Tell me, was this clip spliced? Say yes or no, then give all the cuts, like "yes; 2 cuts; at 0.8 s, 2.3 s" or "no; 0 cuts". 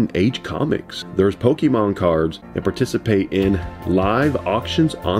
yes; 2 cuts; at 1.0 s, 2.5 s